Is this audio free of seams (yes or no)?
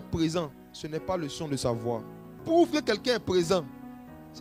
no